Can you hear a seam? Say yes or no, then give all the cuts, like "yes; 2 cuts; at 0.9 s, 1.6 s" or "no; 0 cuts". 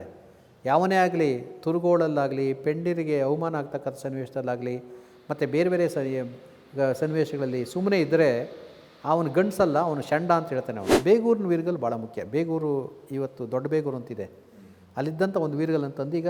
yes; 1 cut; at 10.9 s